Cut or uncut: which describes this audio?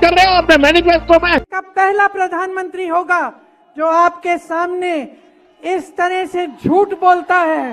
cut